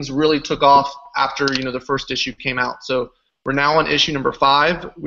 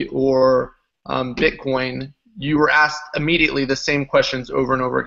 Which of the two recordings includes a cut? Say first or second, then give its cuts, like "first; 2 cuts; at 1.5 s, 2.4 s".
second; 1 cut; at 3.0 s